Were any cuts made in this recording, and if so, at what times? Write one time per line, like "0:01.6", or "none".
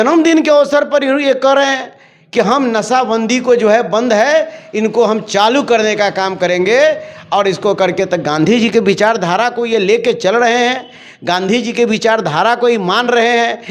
none